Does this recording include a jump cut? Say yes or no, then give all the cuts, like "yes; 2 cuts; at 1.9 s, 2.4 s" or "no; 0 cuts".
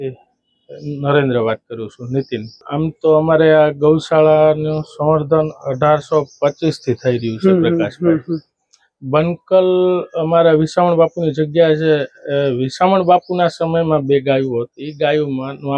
yes; 1 cut; at 2.5 s